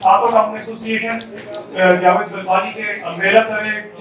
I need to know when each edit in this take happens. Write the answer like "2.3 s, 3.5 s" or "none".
none